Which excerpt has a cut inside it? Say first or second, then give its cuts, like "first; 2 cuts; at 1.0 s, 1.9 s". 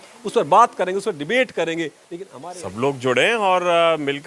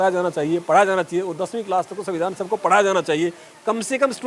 first; 1 cut; at 2.0 s